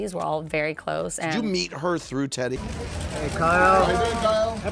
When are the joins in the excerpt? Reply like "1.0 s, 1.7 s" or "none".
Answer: 2.6 s